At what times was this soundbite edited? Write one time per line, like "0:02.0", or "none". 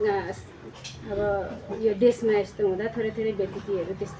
none